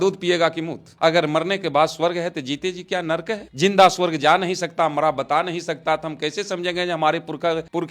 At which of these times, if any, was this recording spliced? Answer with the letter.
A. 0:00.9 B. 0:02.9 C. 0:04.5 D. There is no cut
A